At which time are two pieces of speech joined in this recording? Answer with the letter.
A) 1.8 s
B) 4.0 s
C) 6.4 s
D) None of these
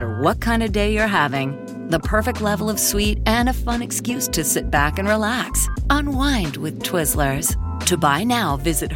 D